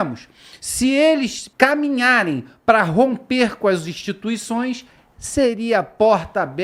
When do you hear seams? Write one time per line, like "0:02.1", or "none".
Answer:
0:01.4

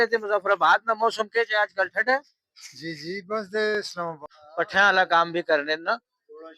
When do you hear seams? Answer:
0:03.9

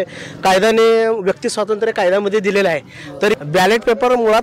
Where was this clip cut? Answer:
0:03.3

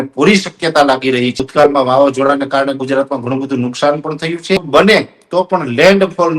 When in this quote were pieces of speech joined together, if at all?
0:01.4
0:04.6

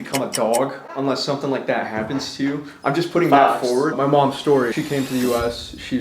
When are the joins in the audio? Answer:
0:03.9
0:04.7

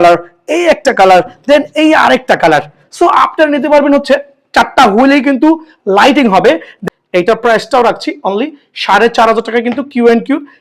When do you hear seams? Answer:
0:06.7

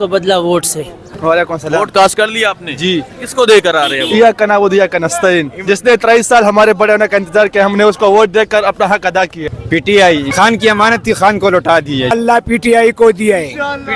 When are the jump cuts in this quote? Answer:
0:01.0
0:09.4
0:12.1

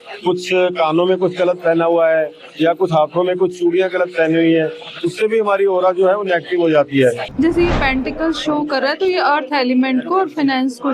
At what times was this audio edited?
0:07.3

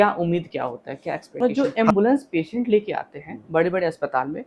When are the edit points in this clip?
0:01.7

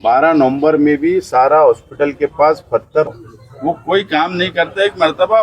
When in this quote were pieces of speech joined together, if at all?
0:03.1

